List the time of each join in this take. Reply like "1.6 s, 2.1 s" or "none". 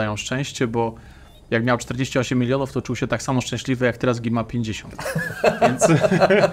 none